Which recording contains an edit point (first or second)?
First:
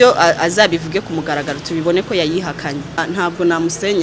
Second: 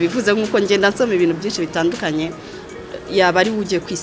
first